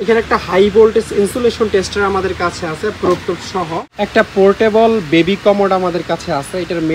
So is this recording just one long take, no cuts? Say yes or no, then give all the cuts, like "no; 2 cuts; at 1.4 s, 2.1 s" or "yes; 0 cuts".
no; 1 cut; at 3.9 s